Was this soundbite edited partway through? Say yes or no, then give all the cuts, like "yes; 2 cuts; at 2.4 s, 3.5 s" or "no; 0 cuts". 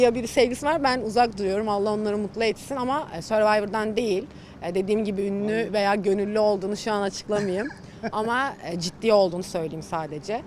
no; 0 cuts